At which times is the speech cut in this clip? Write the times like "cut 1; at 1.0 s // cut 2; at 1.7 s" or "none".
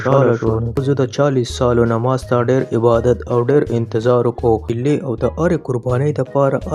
cut 1; at 0.8 s // cut 2; at 4.7 s